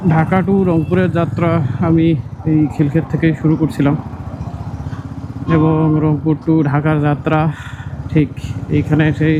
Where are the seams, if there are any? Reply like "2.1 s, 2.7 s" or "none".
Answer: none